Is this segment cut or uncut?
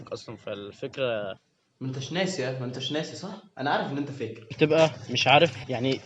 cut